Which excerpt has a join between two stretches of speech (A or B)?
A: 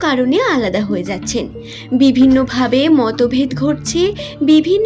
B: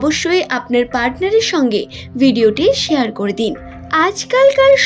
B